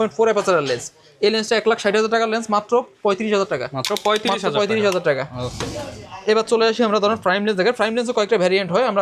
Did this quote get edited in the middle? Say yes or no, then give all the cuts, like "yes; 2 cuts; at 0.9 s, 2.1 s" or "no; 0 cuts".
no; 0 cuts